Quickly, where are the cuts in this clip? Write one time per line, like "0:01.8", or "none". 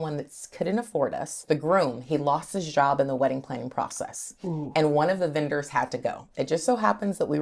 0:01.4